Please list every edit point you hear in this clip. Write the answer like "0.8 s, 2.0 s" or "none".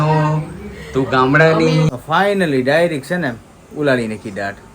1.9 s